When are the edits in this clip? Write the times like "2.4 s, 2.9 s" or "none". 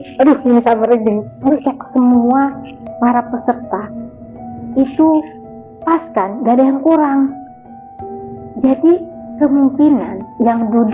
1.4 s